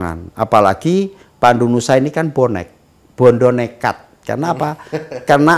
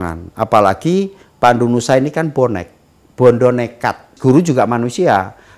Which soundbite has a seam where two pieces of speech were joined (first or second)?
second